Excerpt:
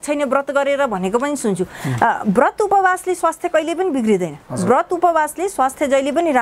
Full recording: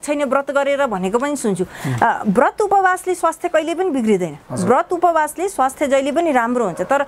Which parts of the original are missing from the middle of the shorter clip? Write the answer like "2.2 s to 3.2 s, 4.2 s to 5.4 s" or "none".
none